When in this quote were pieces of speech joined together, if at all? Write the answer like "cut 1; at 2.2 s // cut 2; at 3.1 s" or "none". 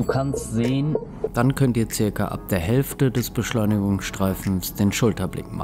cut 1; at 1.3 s